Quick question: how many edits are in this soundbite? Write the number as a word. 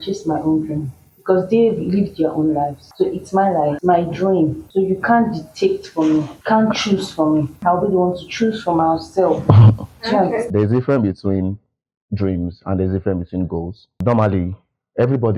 seven